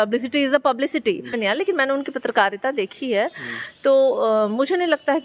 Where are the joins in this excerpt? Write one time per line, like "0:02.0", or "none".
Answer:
0:01.3